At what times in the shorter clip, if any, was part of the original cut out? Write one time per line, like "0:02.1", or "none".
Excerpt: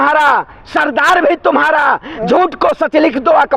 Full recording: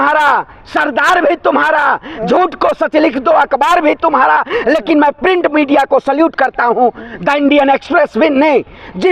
none